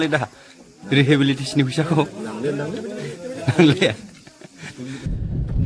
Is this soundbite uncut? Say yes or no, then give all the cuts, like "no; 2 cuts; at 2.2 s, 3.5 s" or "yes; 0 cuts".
yes; 0 cuts